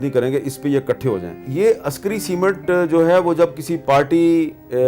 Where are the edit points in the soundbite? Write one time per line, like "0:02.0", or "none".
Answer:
0:01.4
0:03.7